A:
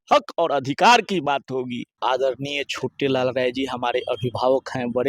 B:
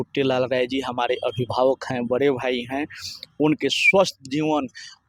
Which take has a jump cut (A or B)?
A